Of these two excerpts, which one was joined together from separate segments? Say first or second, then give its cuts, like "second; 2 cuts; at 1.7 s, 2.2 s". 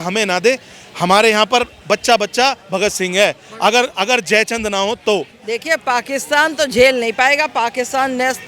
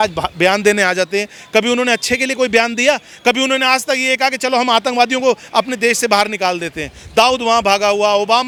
first; 1 cut; at 5.4 s